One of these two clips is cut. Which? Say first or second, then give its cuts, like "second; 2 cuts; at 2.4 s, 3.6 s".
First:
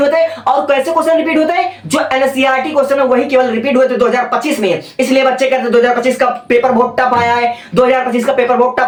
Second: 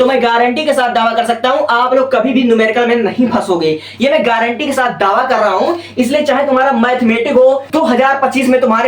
second; 1 cut; at 7.7 s